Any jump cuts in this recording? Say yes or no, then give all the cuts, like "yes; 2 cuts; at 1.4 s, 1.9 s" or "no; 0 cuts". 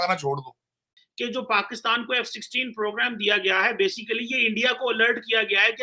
no; 0 cuts